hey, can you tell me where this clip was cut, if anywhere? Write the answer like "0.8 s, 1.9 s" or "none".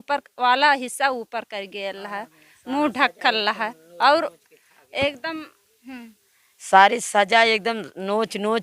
none